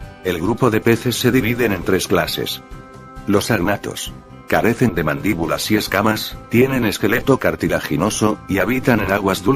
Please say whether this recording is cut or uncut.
uncut